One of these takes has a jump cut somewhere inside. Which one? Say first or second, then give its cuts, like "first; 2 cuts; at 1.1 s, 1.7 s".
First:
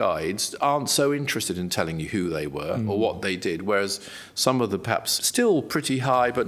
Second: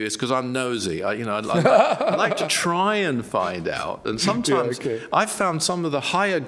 first; 1 cut; at 5.2 s